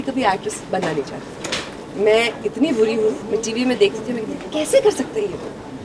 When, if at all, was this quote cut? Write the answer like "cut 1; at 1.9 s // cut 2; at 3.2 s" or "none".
cut 1; at 3.2 s